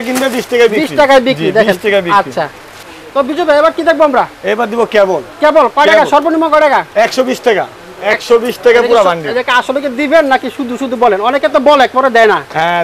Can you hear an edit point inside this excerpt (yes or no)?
no